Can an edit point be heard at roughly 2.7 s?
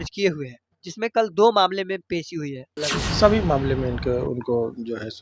yes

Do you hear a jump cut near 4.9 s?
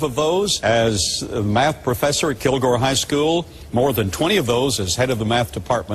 no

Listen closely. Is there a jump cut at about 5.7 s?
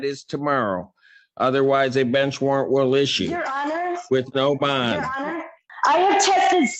yes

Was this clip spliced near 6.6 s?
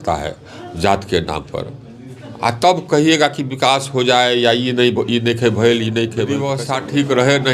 yes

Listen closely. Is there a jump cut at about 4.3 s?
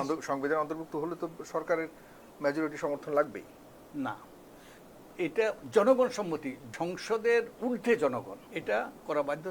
no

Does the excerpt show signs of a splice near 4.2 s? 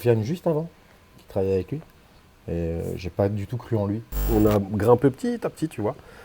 yes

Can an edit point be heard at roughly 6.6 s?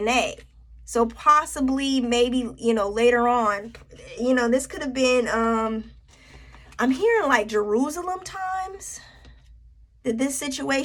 no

